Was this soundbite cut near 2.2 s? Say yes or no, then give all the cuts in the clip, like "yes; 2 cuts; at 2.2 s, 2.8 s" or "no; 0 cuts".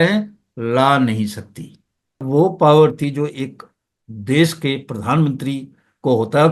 yes; 1 cut; at 2.2 s